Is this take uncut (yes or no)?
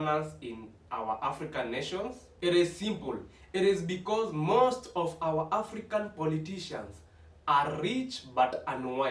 yes